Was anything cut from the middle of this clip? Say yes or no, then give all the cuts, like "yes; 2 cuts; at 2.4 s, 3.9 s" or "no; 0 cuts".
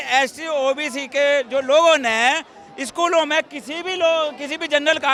no; 0 cuts